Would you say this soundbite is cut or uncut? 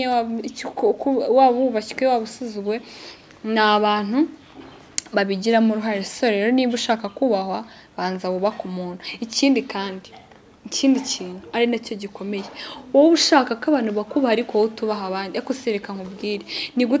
uncut